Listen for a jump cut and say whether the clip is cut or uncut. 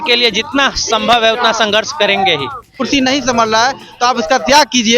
cut